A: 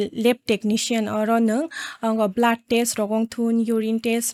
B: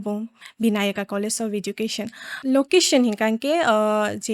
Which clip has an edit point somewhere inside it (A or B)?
B